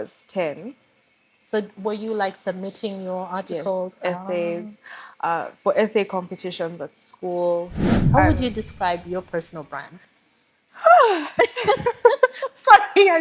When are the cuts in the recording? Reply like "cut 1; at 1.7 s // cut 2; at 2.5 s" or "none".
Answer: cut 1; at 7.9 s